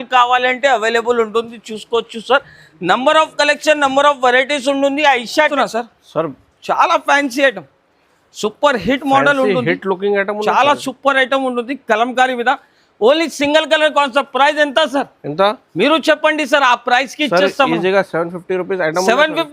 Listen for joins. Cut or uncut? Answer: cut